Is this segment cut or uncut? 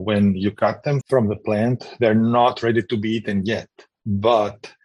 cut